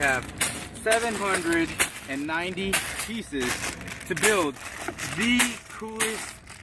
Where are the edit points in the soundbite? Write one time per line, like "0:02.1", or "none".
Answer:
none